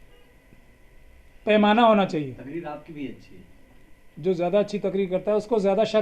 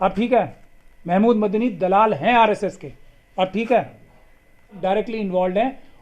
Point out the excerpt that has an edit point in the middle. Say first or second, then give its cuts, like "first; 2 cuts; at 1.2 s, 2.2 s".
second; 1 cut; at 4.8 s